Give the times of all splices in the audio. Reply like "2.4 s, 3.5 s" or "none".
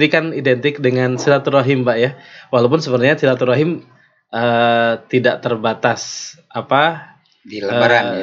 none